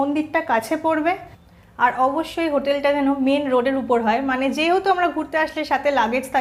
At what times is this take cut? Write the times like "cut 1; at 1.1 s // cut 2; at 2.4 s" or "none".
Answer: none